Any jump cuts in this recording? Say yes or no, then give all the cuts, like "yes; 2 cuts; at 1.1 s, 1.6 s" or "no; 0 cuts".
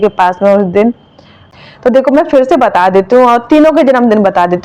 yes; 1 cut; at 1.5 s